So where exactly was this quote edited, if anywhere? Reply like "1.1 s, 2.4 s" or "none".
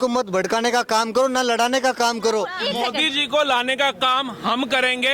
2.6 s